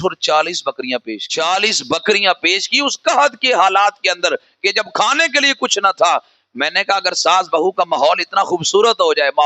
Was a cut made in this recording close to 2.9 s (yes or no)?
no